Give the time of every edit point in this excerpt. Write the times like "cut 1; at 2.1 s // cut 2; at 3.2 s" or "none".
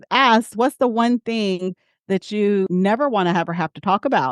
cut 1; at 2.7 s